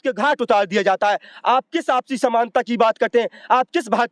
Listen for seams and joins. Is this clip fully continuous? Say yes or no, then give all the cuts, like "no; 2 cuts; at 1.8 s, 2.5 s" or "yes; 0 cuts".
yes; 0 cuts